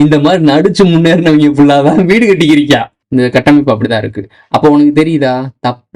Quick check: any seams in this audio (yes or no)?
yes